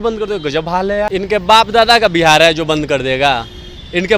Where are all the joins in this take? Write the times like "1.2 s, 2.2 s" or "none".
1.1 s